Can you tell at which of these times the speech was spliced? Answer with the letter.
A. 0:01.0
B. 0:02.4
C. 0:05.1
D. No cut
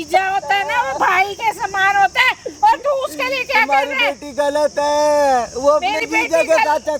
D